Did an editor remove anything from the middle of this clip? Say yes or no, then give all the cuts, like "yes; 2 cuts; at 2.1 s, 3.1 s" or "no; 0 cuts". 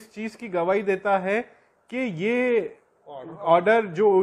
no; 0 cuts